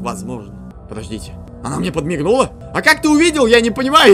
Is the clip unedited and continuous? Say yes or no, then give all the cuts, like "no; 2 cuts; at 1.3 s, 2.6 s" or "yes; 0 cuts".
no; 2 cuts; at 0.9 s, 2.6 s